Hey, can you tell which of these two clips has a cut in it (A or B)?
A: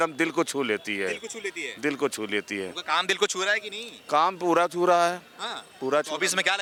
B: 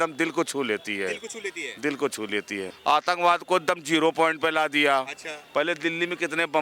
B